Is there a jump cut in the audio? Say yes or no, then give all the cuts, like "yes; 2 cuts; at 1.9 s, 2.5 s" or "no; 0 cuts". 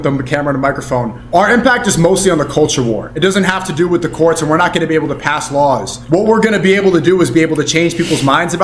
yes; 3 cuts; at 1.2 s, 3.1 s, 5.9 s